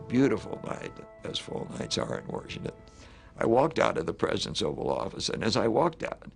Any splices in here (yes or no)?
yes